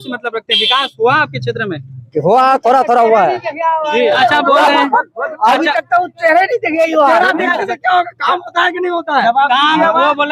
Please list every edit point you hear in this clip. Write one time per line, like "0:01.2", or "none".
0:04.2